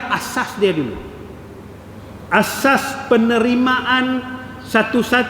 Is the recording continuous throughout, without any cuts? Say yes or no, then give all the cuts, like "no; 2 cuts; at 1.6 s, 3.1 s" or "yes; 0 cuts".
yes; 0 cuts